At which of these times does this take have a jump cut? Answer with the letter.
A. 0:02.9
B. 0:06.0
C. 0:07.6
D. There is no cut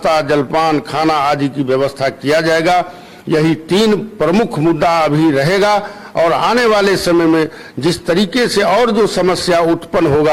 D